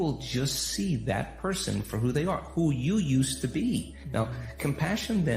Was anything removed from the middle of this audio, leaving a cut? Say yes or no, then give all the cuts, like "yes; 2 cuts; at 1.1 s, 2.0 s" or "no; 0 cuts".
yes; 1 cut; at 1.3 s